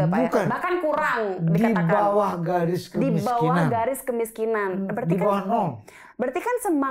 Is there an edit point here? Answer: no; 0 cuts

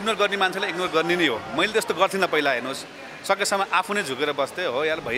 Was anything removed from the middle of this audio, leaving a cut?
no; 0 cuts

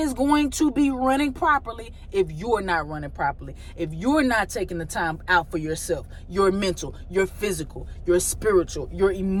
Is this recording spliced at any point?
no; 0 cuts

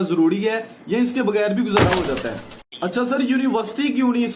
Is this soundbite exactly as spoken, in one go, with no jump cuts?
no; 1 cut; at 2.6 s

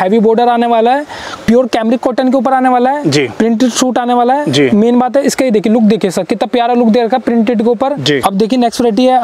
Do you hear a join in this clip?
yes; 2 cuts; at 1.3 s, 8.2 s

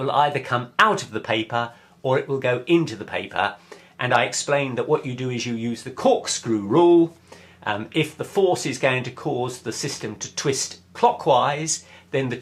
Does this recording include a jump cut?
no; 0 cuts

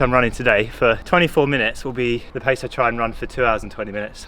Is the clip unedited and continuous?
no; 2 cuts; at 1.0 s, 2.3 s

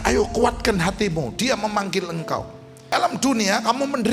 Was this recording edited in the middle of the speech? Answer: yes; 1 cut; at 2.9 s

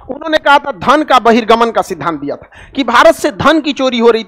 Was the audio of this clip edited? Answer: no; 0 cuts

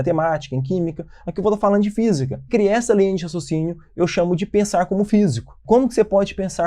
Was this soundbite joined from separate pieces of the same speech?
yes; 2 cuts; at 2.5 s, 5.6 s

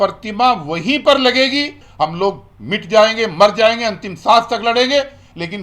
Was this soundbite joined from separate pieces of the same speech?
yes; 1 cut; at 1.8 s

